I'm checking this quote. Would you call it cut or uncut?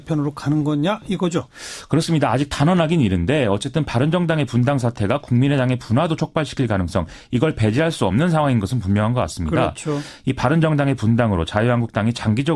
cut